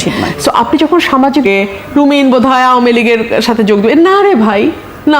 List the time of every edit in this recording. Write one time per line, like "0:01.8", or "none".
0:01.5